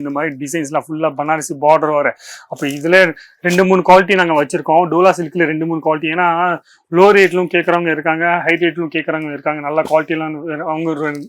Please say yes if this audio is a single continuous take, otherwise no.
yes